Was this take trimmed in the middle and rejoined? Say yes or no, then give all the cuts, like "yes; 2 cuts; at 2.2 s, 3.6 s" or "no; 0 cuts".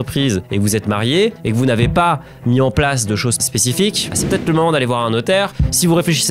yes; 1 cut; at 3.4 s